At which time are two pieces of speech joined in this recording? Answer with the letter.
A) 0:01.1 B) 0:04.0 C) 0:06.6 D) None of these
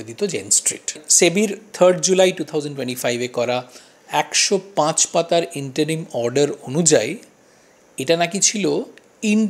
A